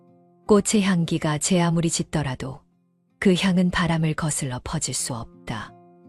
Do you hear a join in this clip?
no; 0 cuts

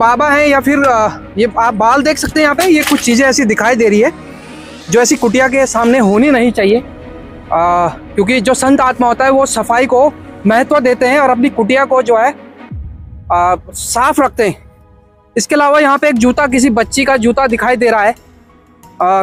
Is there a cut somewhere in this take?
no; 0 cuts

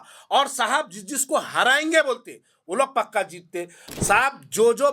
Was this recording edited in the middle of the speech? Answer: yes; 1 cut; at 3.8 s

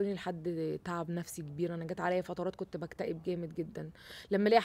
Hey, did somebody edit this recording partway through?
no; 0 cuts

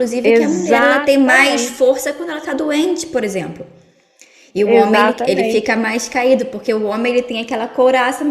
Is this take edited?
no; 0 cuts

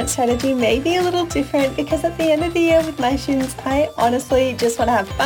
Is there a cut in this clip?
no; 0 cuts

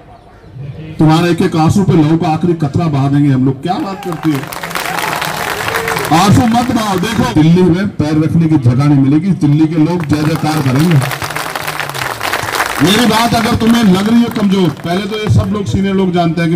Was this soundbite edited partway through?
yes; 1 cut; at 7.3 s

